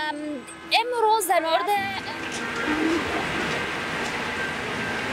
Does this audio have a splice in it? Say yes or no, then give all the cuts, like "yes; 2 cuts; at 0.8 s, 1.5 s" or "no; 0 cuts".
no; 0 cuts